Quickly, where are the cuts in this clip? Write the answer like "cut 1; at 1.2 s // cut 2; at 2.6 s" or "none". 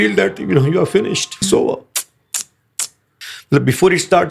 cut 1; at 1.4 s // cut 2; at 3.1 s